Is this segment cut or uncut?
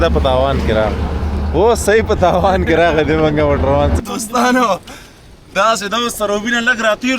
cut